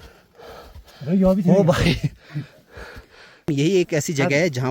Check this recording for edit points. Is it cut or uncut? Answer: cut